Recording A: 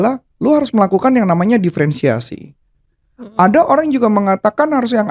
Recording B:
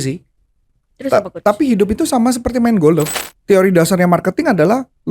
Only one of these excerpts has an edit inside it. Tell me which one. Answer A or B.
B